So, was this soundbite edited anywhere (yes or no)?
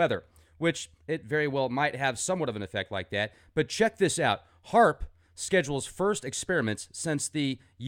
yes